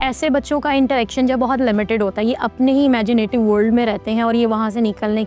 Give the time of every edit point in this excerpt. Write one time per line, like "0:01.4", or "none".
none